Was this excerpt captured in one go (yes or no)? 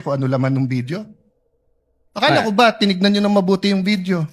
no